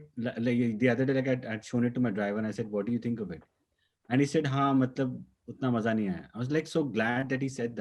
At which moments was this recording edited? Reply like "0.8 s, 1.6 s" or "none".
none